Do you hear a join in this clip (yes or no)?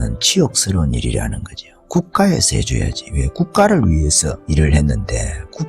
yes